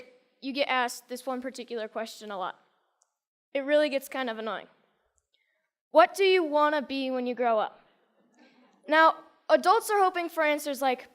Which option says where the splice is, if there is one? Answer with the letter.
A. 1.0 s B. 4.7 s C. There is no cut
A